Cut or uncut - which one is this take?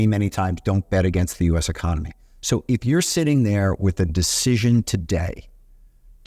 uncut